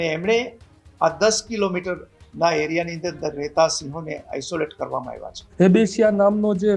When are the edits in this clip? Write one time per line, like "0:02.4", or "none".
0:05.4